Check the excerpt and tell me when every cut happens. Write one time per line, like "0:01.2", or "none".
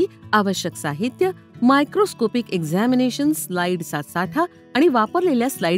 none

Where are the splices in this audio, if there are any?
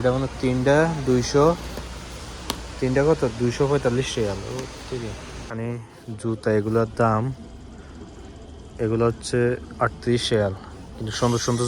0:05.4

